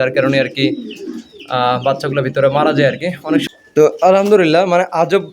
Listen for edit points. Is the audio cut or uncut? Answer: cut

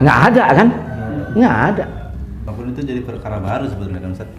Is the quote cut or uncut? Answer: cut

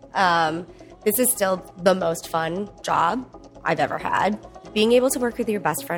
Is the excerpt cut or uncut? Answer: cut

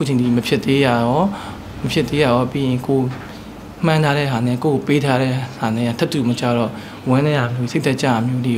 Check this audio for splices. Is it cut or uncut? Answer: uncut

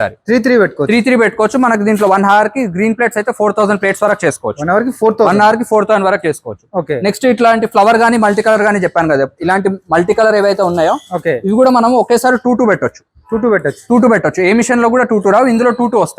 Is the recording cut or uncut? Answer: uncut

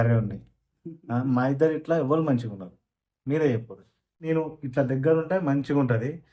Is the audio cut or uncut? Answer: cut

